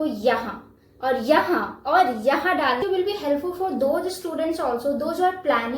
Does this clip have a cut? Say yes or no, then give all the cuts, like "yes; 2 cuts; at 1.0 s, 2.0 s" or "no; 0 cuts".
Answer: yes; 1 cut; at 2.8 s